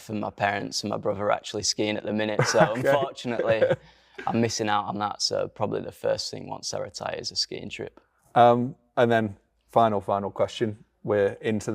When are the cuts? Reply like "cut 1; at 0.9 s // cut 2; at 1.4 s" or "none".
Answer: none

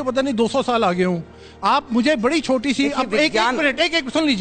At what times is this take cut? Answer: none

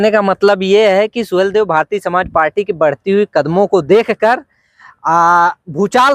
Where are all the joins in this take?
none

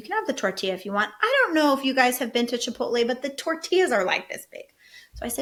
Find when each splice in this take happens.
none

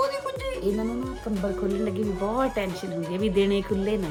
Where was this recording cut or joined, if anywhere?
none

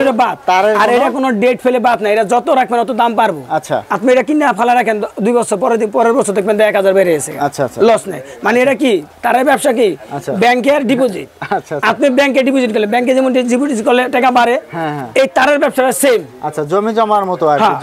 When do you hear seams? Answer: none

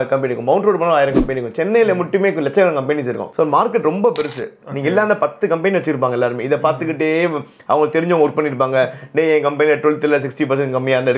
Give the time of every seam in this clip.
none

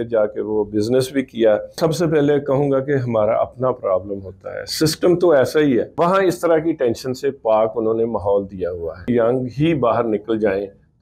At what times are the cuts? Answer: cut 1; at 1.8 s // cut 2; at 5.9 s // cut 3; at 9.1 s

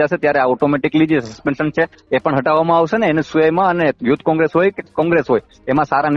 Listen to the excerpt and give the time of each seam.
none

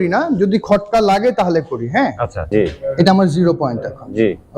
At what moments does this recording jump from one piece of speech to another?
cut 1; at 2.3 s

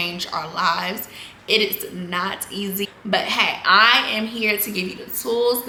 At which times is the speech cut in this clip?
none

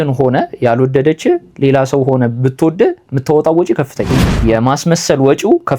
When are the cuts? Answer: cut 1; at 4.3 s

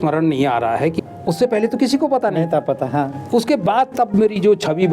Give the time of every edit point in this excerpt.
cut 1; at 1.0 s

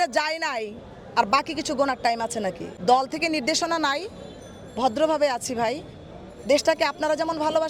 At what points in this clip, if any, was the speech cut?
cut 1; at 2.7 s

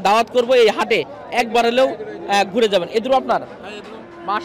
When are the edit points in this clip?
none

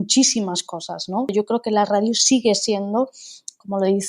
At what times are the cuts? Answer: cut 1; at 1.3 s

